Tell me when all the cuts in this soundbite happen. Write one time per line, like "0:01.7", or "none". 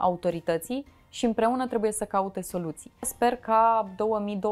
0:03.1